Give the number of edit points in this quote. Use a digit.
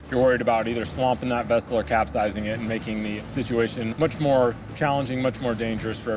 0